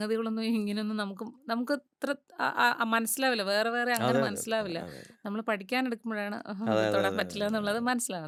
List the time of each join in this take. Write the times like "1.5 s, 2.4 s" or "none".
none